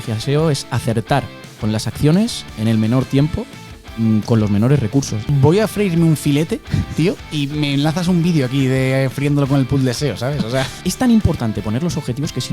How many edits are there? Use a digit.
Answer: 2